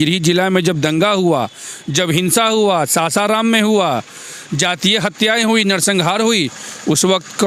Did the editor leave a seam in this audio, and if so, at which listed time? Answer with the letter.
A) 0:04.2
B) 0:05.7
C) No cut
C